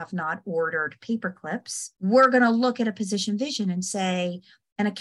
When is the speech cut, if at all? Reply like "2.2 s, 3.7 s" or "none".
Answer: 1.8 s